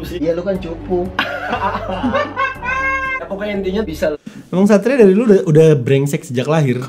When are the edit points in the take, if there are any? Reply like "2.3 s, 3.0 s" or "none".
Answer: none